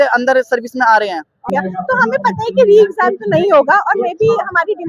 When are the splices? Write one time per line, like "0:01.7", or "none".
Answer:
0:01.5